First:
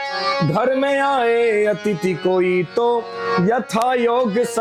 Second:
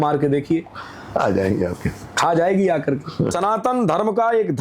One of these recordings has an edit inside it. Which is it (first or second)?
second